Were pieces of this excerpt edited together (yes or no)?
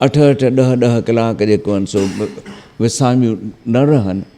no